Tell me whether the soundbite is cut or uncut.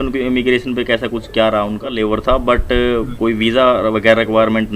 cut